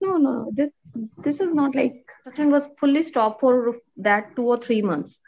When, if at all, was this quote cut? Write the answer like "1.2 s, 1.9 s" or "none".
2.3 s